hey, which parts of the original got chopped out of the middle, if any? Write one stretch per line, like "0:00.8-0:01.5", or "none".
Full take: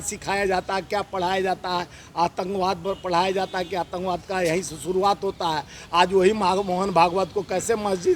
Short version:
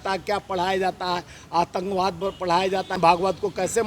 0:03.6-0:06.9